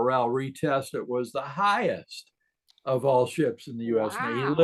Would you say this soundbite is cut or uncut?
uncut